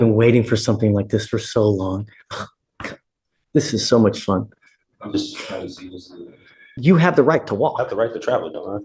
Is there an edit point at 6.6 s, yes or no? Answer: yes